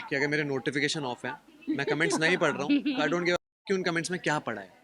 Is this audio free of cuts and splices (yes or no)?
yes